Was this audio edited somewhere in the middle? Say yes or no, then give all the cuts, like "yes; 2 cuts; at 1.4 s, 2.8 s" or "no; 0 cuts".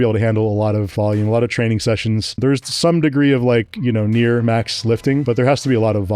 yes; 3 cuts; at 0.9 s, 2.4 s, 5.2 s